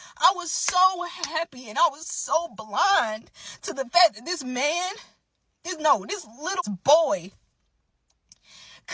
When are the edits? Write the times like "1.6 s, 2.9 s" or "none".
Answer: 6.6 s